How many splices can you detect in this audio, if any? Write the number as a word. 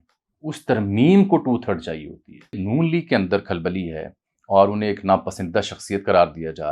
one